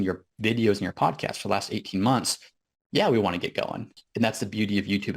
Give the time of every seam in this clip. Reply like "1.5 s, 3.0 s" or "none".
4.0 s